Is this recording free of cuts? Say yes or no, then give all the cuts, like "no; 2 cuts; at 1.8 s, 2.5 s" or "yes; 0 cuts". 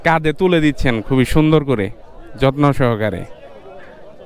yes; 0 cuts